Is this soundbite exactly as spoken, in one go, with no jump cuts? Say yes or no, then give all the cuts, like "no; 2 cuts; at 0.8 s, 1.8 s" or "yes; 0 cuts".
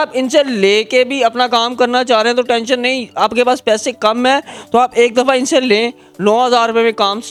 yes; 0 cuts